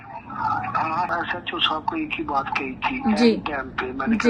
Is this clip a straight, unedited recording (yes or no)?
no